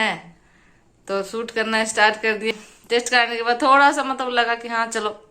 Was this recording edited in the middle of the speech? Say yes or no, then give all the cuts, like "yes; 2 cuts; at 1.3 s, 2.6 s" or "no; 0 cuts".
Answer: yes; 1 cut; at 2.5 s